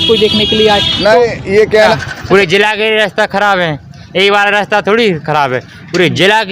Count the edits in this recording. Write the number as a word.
one